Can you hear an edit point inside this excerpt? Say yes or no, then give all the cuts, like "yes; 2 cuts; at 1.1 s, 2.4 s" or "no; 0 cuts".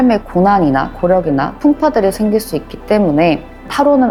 no; 0 cuts